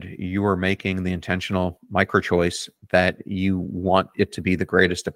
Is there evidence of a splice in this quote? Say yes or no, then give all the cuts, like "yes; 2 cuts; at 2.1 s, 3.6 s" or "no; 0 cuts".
no; 0 cuts